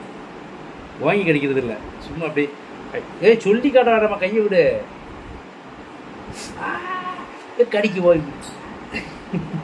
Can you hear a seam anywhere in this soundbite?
no; 0 cuts

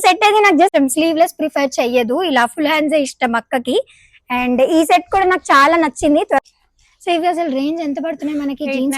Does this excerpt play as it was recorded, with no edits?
no; 2 cuts; at 0.7 s, 6.4 s

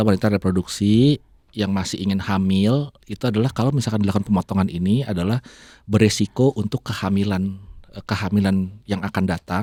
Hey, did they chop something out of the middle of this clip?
no; 0 cuts

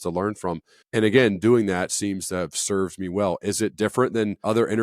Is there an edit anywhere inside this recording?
yes; 2 cuts; at 2.6 s, 4.1 s

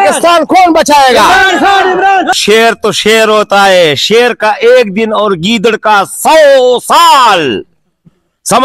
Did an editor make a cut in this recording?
no; 0 cuts

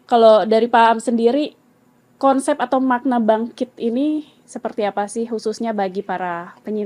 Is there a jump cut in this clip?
no; 0 cuts

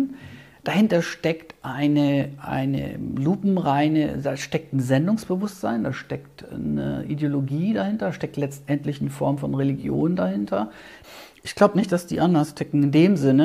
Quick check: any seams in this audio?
yes; 1 cut; at 10.9 s

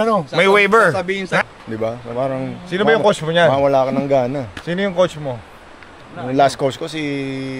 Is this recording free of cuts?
no; 1 cut; at 1.4 s

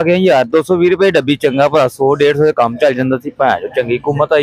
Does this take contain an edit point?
no; 0 cuts

